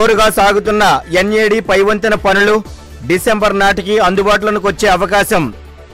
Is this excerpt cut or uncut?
uncut